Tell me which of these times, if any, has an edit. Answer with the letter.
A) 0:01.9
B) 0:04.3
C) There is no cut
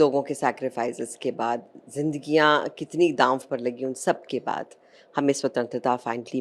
C